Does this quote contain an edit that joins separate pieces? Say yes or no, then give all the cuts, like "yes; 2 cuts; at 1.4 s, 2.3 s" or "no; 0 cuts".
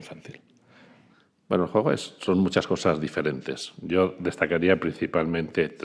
yes; 1 cut; at 2.1 s